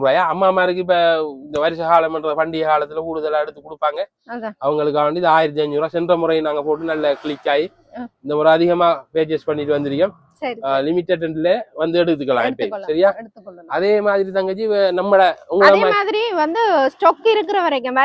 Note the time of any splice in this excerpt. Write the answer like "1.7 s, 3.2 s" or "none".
none